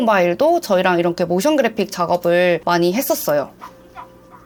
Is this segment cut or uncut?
uncut